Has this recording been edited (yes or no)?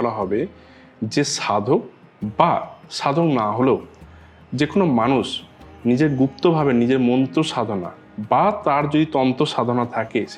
no